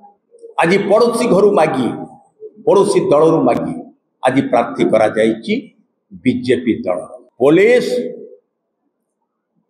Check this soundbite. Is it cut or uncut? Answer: cut